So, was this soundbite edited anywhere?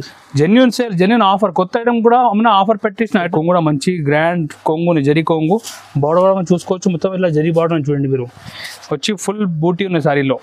yes; 1 cut; at 3.3 s

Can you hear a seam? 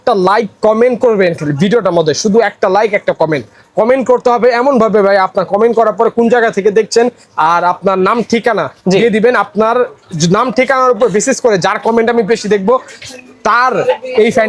no; 0 cuts

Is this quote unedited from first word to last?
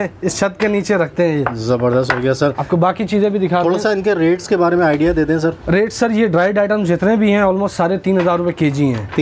yes; 0 cuts

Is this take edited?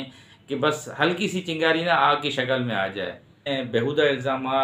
yes; 1 cut; at 3.5 s

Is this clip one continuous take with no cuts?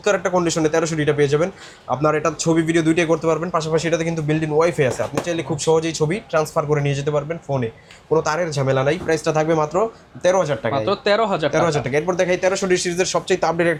yes; 0 cuts

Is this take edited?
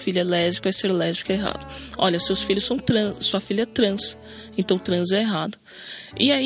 no; 0 cuts

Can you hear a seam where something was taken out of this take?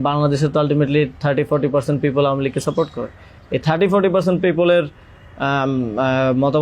no; 0 cuts

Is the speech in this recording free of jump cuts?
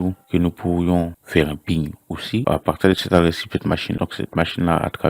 no; 2 cuts; at 2.4 s, 4.0 s

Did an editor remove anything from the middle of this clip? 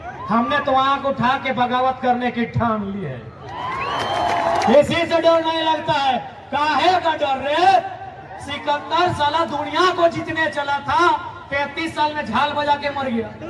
yes; 1 cut; at 4.7 s

